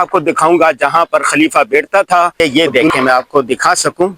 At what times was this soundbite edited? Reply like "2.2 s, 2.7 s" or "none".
2.4 s